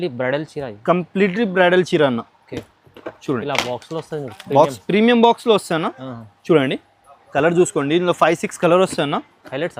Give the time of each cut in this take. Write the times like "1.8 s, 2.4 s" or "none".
none